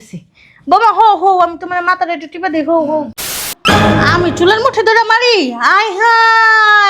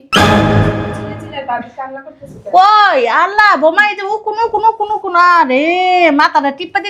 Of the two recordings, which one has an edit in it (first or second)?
first